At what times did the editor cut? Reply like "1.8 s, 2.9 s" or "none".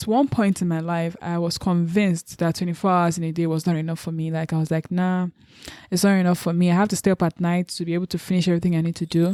none